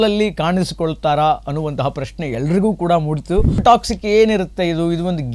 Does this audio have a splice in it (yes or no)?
yes